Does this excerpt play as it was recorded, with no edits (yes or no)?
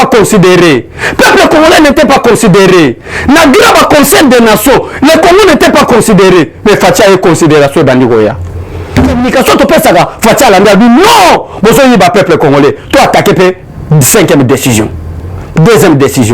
no